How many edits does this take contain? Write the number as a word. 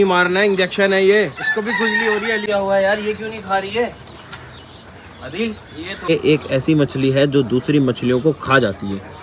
two